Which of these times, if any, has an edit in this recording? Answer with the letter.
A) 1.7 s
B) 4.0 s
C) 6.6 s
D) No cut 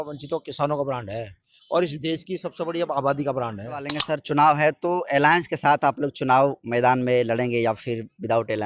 B